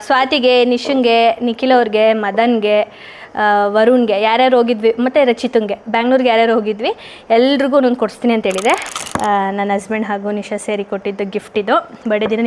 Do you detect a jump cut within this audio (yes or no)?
yes